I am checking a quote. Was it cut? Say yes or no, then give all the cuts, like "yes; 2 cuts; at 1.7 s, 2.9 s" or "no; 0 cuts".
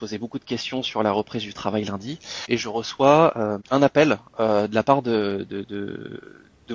no; 0 cuts